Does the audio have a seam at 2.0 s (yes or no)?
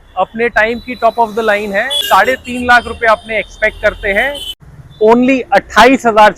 yes